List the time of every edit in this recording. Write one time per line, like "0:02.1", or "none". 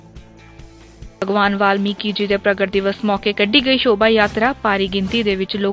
0:01.0